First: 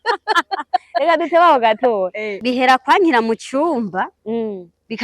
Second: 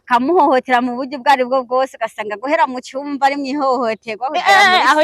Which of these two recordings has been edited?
first; 1 cut; at 2.3 s

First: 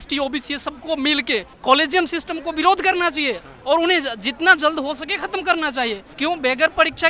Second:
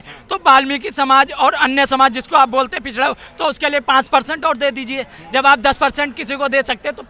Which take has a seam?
first; 2 cuts; at 1.5 s, 6.1 s

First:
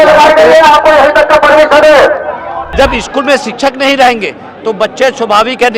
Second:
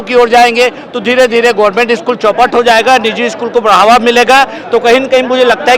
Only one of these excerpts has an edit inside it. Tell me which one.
first; 1 cut; at 2.6 s

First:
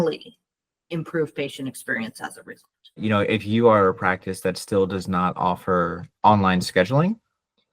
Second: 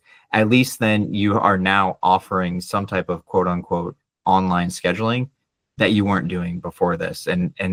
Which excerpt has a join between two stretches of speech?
first; 1 cut; at 3.0 s

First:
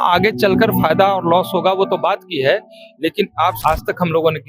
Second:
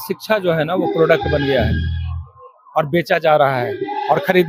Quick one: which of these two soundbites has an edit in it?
first; 1 cut; at 3.6 s

